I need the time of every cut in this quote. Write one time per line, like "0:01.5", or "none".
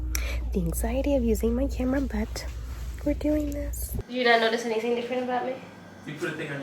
0:03.8